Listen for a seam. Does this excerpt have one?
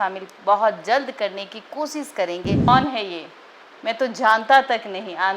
yes; 1 cut; at 2.7 s

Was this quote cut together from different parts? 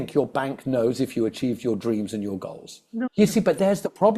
yes; 1 cut; at 3.0 s

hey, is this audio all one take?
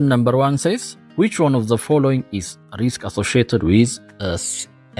no; 1 cut; at 1.0 s

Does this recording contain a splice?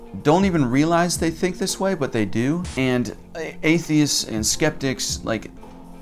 yes; 1 cut; at 2.7 s

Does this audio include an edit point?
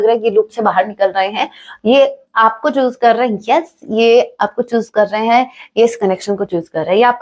no; 0 cuts

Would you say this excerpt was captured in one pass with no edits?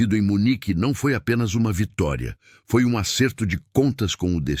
yes; 0 cuts

